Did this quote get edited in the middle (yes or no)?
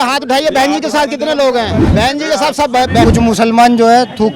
yes